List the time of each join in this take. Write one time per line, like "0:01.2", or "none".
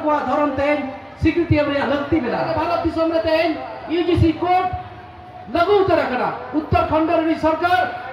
0:02.5